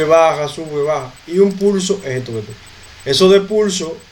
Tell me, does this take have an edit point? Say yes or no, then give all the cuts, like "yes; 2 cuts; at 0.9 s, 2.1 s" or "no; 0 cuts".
no; 0 cuts